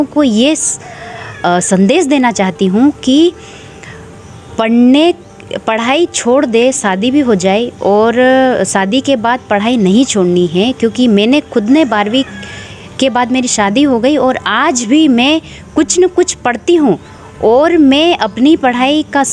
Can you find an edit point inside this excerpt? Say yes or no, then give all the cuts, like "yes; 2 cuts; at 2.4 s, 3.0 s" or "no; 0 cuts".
no; 0 cuts